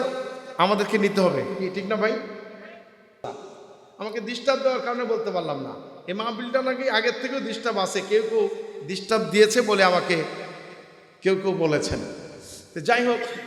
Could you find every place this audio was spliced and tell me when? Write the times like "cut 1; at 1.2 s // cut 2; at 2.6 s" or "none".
cut 1; at 3.2 s